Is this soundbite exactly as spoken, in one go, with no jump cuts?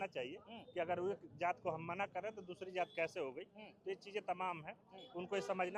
yes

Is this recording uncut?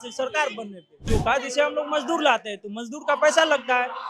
no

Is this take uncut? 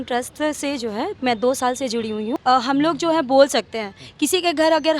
no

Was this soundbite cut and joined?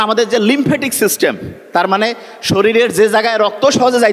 no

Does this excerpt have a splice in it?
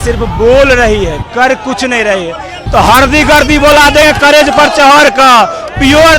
yes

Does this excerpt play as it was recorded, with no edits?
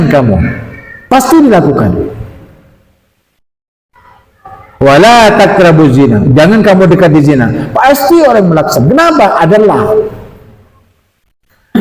yes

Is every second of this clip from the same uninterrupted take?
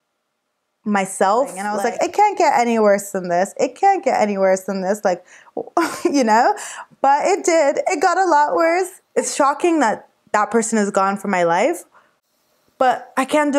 no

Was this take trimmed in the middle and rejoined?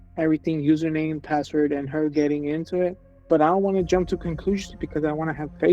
yes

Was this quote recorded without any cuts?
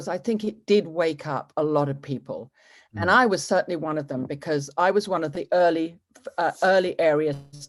yes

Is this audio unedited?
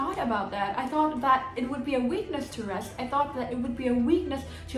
yes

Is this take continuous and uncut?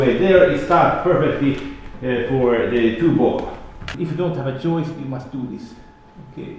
no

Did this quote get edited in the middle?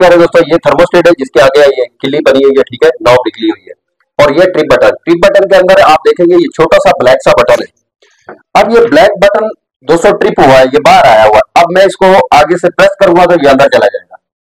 no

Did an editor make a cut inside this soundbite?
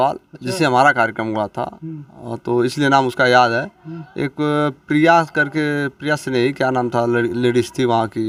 no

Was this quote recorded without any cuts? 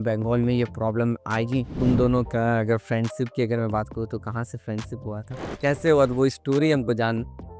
no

